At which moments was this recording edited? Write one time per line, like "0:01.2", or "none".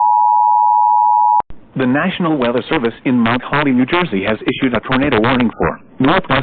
0:01.4